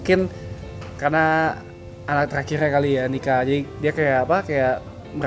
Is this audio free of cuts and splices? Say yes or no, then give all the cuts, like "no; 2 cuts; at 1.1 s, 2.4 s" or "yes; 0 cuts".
no; 1 cut; at 2.8 s